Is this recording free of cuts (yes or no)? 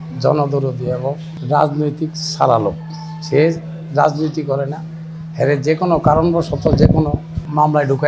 yes